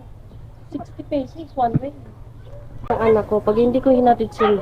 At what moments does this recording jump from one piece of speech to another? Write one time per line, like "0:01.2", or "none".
0:02.9